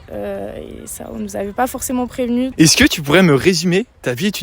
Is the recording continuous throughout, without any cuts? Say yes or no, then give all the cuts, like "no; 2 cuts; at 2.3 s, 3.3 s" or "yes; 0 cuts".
no; 1 cut; at 2.5 s